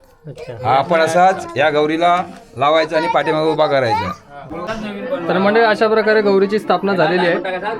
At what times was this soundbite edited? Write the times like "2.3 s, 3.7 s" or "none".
4.6 s